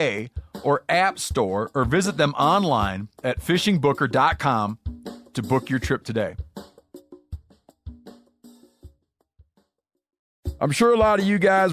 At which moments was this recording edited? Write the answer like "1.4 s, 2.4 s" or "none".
10.4 s